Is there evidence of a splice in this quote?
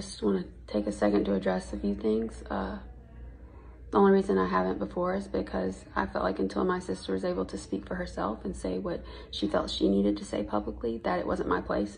no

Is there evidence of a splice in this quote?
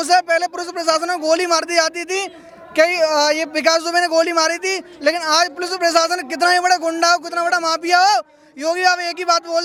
no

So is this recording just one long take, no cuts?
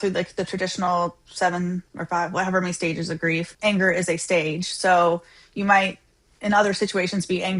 no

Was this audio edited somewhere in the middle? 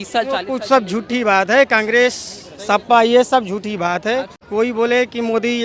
yes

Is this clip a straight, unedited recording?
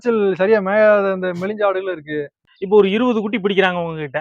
no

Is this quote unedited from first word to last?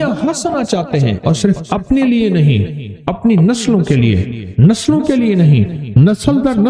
yes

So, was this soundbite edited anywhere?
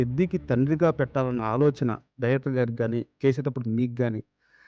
no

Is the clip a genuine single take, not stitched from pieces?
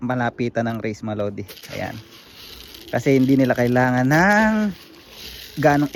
yes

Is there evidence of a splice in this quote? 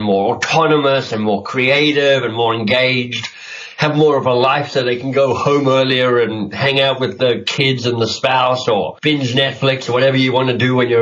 yes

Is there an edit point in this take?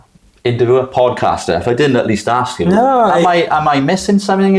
no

